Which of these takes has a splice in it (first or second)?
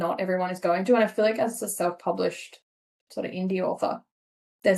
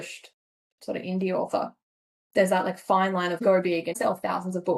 second